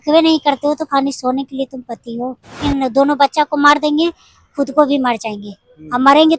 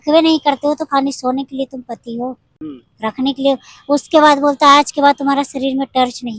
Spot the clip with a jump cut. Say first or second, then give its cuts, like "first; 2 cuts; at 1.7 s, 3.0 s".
first; 1 cut; at 2.6 s